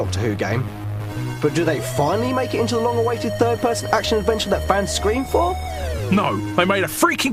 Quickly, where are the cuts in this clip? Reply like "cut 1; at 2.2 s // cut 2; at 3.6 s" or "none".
none